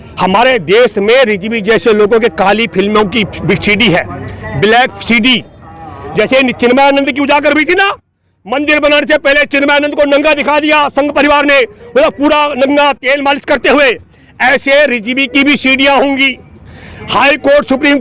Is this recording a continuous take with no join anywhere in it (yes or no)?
yes